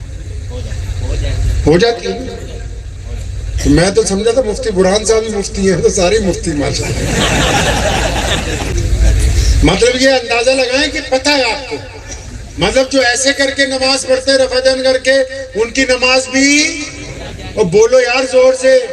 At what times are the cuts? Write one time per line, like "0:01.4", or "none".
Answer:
0:08.7